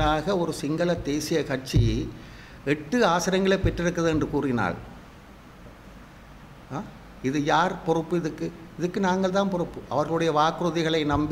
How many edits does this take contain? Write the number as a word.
zero